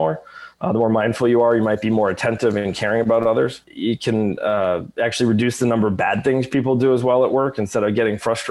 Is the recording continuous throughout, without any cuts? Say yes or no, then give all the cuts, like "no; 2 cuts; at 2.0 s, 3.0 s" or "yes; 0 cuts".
yes; 0 cuts